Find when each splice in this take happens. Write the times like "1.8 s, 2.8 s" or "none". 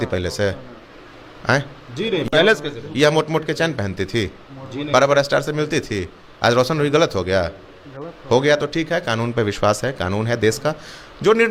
none